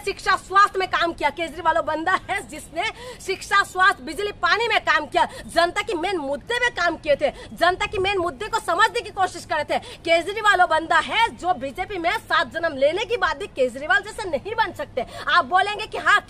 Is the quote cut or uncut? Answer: uncut